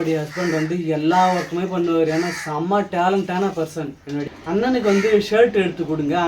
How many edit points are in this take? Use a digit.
1